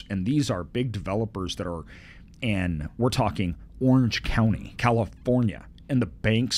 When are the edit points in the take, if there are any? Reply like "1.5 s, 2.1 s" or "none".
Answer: 4.7 s